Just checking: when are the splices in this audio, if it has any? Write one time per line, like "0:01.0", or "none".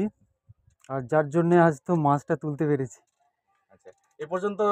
none